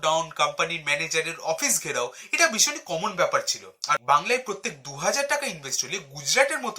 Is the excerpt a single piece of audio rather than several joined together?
no; 1 cut; at 4.0 s

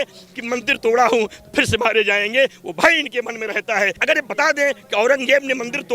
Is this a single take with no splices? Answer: no; 1 cut; at 4.0 s

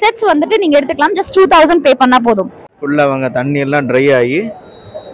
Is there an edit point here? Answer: yes; 1 cut; at 2.7 s

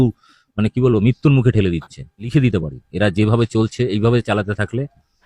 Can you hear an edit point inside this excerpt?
yes; 1 cut; at 2.3 s

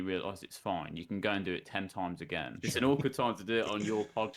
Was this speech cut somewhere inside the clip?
yes; 1 cut; at 2.6 s

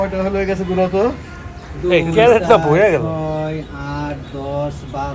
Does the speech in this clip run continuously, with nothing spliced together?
yes; 0 cuts

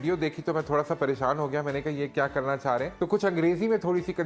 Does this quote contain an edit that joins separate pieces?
yes; 1 cut; at 2.9 s

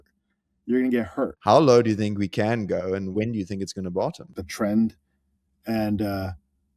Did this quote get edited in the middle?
yes; 3 cuts; at 1.4 s, 3.1 s, 4.4 s

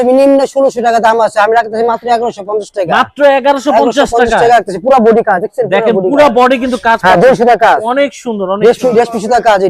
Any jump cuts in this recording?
no; 0 cuts

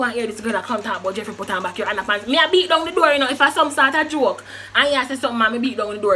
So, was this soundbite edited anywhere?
no; 0 cuts

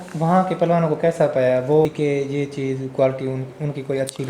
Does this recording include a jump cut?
yes; 1 cut; at 1.9 s

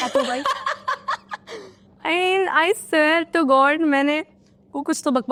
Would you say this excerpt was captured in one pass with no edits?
yes; 0 cuts

